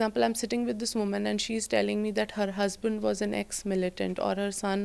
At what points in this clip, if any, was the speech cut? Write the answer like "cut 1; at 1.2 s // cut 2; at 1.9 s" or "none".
none